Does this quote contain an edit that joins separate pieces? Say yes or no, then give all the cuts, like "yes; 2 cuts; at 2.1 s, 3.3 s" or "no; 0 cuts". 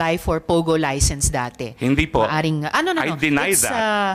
no; 0 cuts